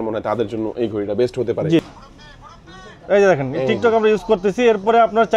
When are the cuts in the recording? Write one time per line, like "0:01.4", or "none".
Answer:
0:01.8